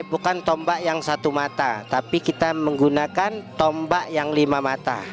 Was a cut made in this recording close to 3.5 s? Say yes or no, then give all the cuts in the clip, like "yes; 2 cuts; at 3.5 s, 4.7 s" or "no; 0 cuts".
no; 0 cuts